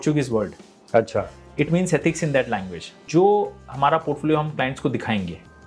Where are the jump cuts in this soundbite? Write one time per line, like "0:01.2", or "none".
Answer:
0:03.0